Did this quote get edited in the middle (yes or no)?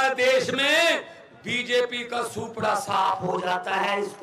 no